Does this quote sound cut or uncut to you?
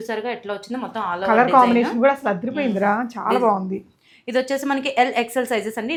uncut